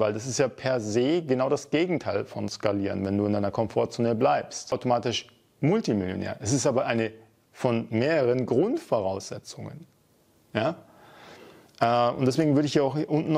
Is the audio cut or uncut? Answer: cut